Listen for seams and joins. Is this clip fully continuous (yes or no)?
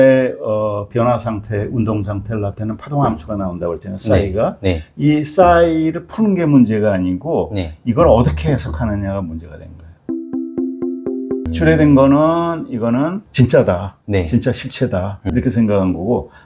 yes